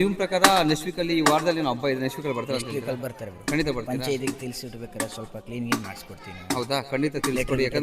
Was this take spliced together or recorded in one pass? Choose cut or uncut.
uncut